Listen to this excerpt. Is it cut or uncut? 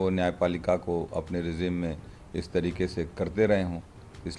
uncut